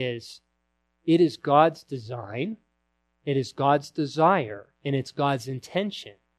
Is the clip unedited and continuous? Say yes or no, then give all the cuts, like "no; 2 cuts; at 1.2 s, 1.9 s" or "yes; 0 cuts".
yes; 0 cuts